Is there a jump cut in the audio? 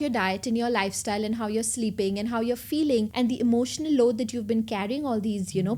yes; 1 cut; at 3.1 s

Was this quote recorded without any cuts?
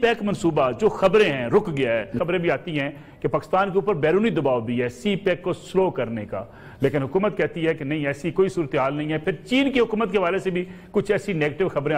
no; 1 cut; at 2.2 s

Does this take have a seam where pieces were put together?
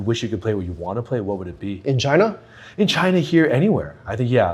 no; 0 cuts

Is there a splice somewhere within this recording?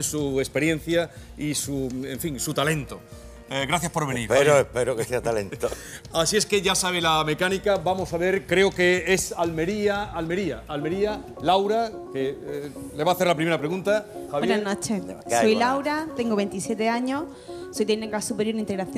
no; 0 cuts

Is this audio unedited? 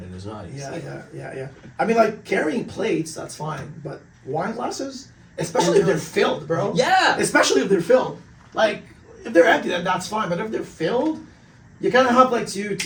yes; 0 cuts

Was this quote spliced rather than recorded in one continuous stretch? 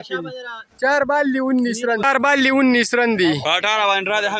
yes; 1 cut; at 2.2 s

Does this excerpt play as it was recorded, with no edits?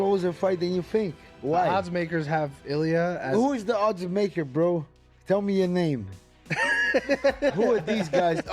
yes; 0 cuts

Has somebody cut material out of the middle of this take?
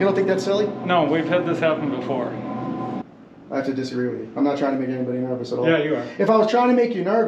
yes; 1 cut; at 3.0 s

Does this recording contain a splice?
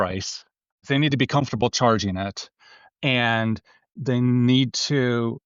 yes; 2 cuts; at 1.1 s, 3.9 s

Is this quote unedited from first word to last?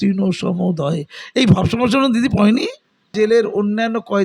no; 1 cut; at 3.1 s

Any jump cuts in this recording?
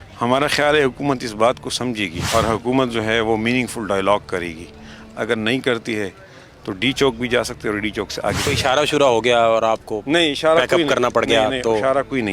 yes; 2 cuts; at 2.1 s, 8.4 s

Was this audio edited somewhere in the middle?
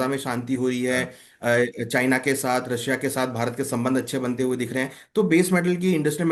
no; 0 cuts

